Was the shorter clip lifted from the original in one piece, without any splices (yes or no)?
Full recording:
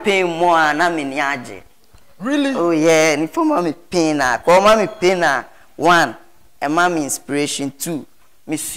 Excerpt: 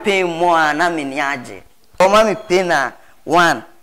no